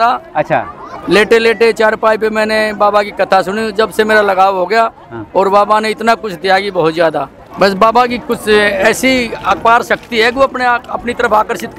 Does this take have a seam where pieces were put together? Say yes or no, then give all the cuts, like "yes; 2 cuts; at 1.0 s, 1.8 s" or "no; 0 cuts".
yes; 1 cut; at 7.4 s